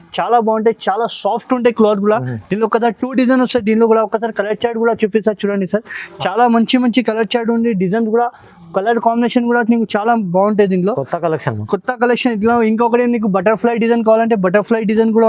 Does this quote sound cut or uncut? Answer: uncut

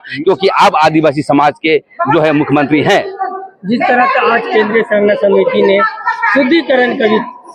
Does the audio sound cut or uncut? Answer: uncut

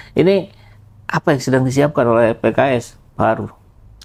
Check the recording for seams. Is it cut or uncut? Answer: uncut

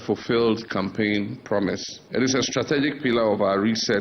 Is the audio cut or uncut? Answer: cut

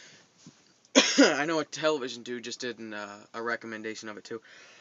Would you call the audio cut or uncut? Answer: uncut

